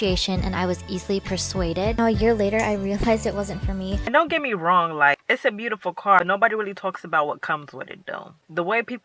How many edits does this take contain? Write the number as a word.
one